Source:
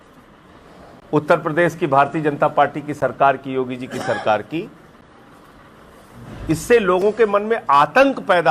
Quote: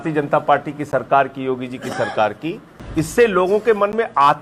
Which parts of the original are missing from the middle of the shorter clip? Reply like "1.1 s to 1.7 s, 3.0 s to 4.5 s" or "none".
4.8 s to 6.3 s